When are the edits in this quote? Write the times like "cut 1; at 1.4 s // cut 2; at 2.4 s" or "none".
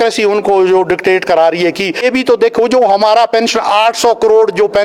cut 1; at 2.0 s

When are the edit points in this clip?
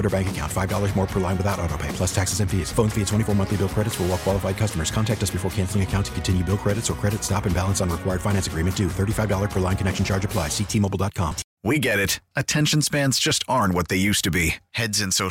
cut 1; at 11.5 s

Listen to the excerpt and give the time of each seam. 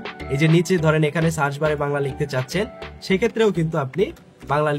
none

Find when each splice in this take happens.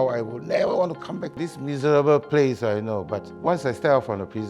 cut 1; at 1.5 s // cut 2; at 3.2 s

